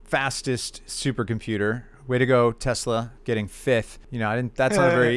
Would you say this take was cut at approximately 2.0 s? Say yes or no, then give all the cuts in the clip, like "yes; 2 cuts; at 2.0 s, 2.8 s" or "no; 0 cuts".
no; 1 cut; at 4.0 s